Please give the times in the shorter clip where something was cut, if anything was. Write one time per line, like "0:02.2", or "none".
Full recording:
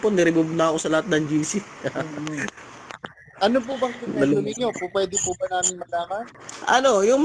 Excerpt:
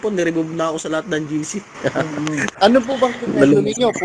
0:02.5